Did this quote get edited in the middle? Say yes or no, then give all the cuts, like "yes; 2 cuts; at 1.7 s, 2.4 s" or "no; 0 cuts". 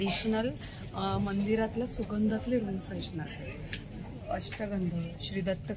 no; 0 cuts